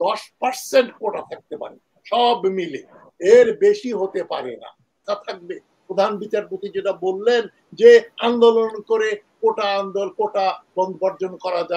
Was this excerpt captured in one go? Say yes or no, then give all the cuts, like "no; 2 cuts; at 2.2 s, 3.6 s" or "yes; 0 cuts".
no; 1 cut; at 5.0 s